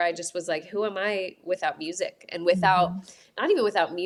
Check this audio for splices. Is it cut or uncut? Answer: uncut